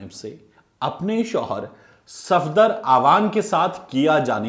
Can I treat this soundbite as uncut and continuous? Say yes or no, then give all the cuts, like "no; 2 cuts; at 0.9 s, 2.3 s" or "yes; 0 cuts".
yes; 0 cuts